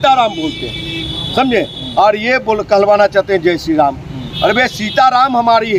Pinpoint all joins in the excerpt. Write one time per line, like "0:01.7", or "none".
none